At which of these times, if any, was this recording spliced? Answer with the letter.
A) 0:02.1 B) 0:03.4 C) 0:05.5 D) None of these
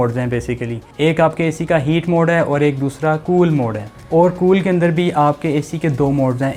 D